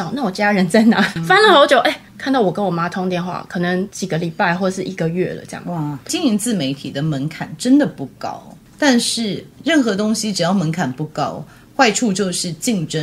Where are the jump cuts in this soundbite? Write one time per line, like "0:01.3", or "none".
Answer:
0:01.2
0:04.0
0:06.1